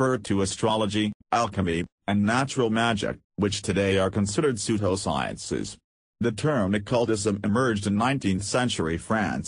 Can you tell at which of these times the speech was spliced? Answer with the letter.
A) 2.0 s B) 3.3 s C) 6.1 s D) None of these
C